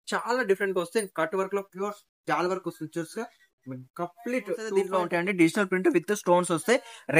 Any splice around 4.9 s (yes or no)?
yes